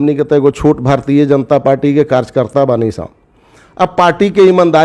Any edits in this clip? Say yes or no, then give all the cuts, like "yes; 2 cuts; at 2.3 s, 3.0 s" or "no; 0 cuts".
no; 0 cuts